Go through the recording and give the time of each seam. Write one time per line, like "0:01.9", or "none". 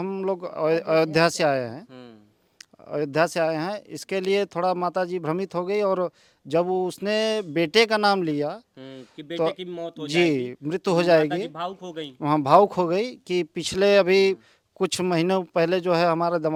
none